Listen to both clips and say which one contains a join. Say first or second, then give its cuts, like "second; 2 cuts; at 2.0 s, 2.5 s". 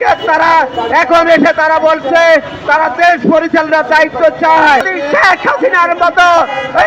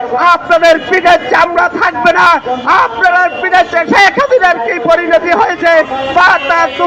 first; 1 cut; at 4.9 s